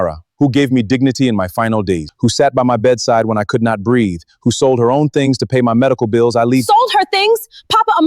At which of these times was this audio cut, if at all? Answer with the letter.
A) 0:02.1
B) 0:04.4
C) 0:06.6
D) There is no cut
A